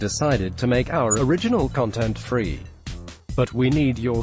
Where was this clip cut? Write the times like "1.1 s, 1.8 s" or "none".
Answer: none